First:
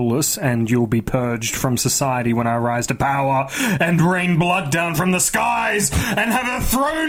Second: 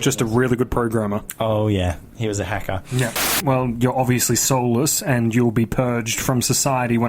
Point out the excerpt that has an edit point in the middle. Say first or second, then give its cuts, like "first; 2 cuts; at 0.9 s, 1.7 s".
second; 1 cut; at 3.4 s